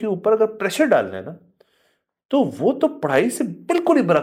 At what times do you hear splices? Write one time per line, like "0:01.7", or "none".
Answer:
none